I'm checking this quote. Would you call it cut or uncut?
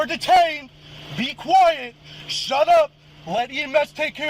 uncut